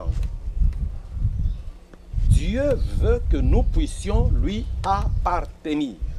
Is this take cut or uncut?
uncut